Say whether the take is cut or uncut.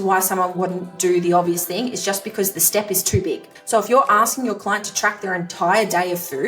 cut